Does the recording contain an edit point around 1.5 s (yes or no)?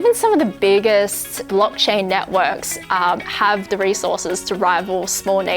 yes